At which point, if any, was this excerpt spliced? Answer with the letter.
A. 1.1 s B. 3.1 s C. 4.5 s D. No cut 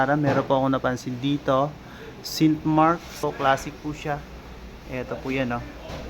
B